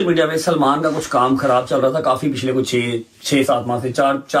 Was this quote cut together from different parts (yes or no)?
no